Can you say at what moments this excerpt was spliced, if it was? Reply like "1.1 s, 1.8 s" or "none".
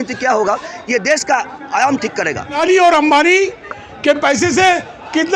2.6 s